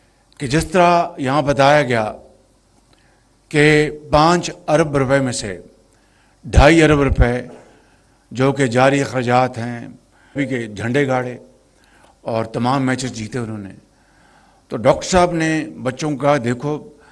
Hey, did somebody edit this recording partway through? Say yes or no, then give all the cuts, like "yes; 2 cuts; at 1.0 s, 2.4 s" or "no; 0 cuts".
yes; 1 cut; at 10.4 s